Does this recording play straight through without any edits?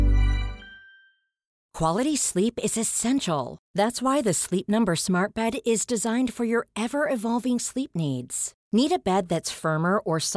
no; 1 cut; at 1.6 s

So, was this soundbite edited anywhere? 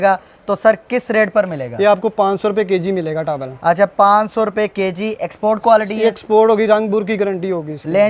no; 0 cuts

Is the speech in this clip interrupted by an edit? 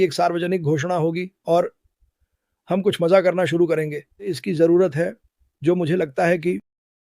yes; 1 cut; at 4.4 s

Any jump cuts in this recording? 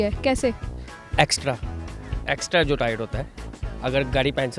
no; 0 cuts

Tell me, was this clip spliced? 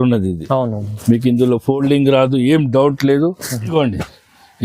yes; 1 cut; at 3.6 s

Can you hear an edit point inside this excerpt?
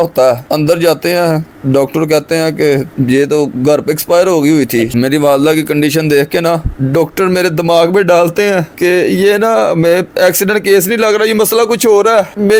no; 0 cuts

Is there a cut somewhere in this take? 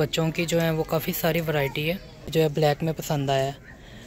yes; 1 cut; at 2.3 s

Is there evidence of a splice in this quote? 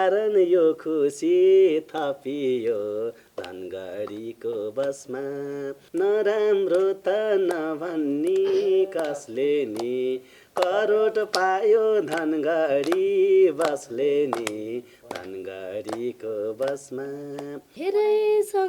yes; 2 cuts; at 5.8 s, 17.7 s

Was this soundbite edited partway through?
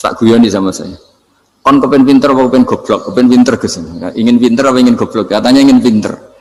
no; 0 cuts

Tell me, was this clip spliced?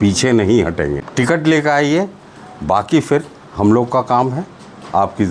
yes; 1 cut; at 1.0 s

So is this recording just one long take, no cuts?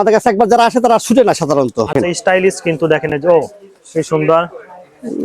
no; 1 cut; at 1.9 s

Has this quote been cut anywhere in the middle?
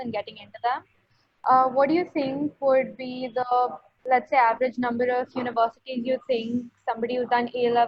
no; 0 cuts

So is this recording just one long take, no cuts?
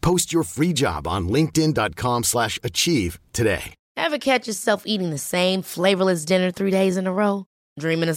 no; 1 cut; at 3.8 s

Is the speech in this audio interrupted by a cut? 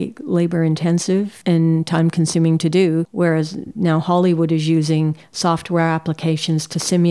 yes; 1 cut; at 1.3 s

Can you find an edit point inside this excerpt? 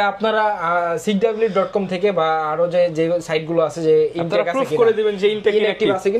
no; 0 cuts

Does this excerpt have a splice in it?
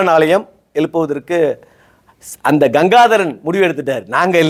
no; 0 cuts

